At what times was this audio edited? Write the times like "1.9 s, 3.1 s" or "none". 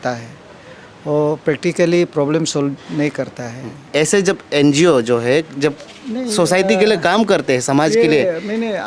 3.8 s